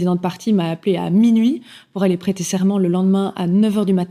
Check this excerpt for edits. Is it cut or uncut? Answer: uncut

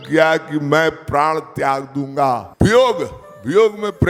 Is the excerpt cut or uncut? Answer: cut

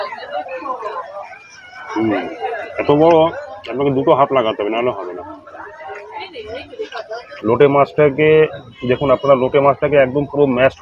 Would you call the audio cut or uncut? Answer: cut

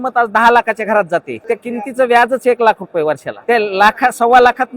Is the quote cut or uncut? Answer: cut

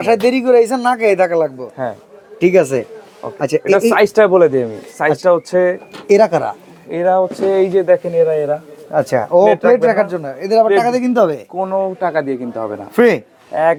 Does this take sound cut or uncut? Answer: uncut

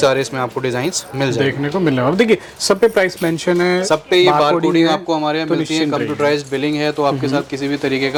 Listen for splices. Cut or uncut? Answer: uncut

